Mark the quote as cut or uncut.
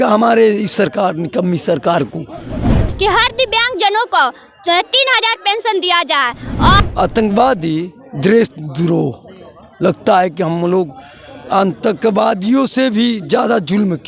cut